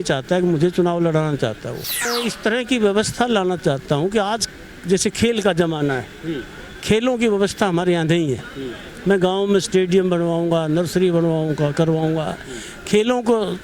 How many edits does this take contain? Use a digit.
1